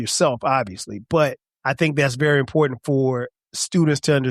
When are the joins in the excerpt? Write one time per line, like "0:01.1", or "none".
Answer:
0:01.5